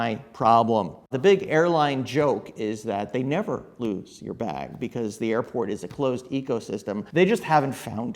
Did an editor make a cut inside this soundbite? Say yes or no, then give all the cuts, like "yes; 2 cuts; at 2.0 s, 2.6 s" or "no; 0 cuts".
yes; 2 cuts; at 1.1 s, 7.0 s